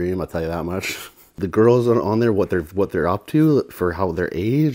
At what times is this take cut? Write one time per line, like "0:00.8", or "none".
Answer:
0:01.3